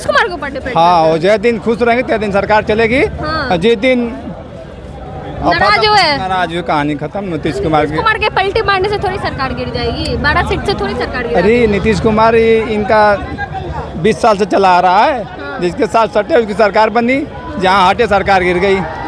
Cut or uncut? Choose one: uncut